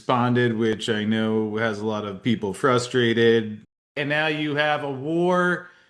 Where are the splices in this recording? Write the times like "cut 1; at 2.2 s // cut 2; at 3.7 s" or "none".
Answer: cut 1; at 3.9 s